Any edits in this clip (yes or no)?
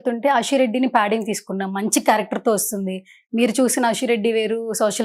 no